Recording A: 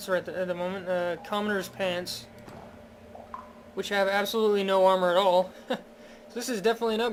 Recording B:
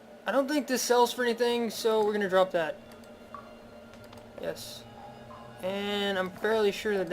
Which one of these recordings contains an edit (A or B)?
B